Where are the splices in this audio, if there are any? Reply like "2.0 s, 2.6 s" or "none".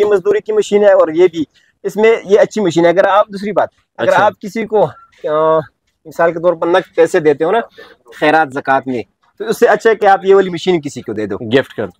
none